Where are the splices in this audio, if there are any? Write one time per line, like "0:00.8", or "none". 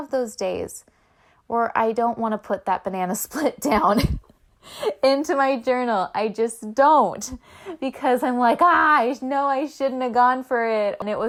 none